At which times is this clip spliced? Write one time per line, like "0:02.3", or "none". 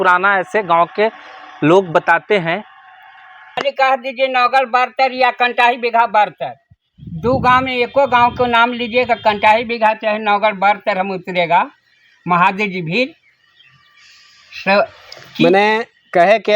0:03.6